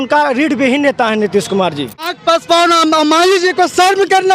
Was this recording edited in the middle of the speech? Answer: yes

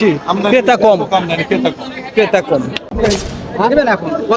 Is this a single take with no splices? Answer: no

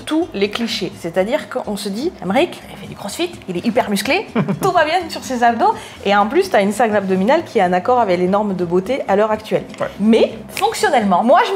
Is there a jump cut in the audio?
no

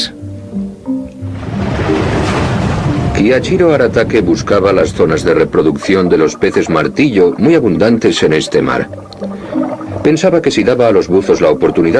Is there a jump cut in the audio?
yes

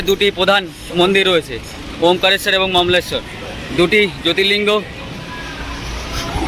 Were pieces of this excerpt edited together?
no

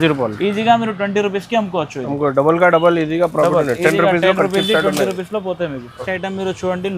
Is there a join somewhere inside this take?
yes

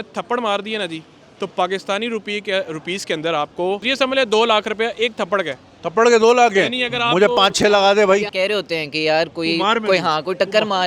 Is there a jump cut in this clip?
yes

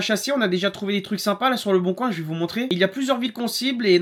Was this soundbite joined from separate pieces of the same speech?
no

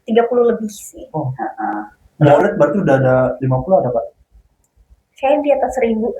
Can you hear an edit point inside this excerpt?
yes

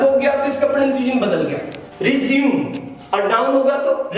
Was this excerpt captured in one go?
yes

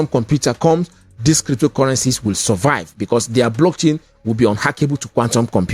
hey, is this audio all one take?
yes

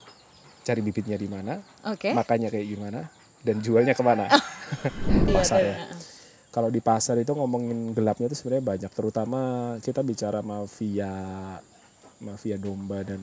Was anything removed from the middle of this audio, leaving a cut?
yes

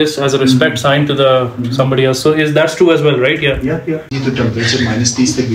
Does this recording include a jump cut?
yes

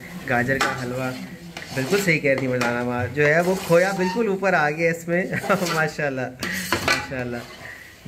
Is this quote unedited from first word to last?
yes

